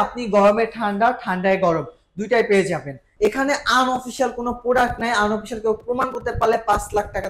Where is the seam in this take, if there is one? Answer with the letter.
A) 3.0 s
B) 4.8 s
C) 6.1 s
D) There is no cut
A